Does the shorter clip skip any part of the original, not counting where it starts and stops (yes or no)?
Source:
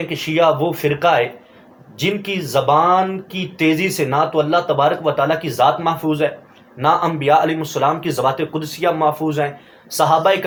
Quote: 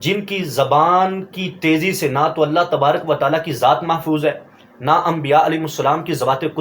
no